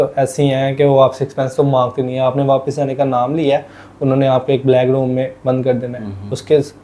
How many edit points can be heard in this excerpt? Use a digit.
0